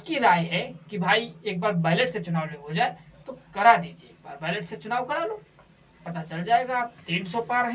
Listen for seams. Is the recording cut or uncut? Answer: uncut